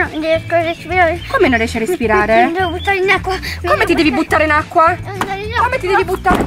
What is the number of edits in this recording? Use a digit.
0